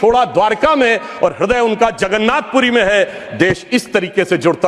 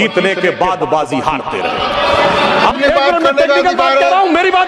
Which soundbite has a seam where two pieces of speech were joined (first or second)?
second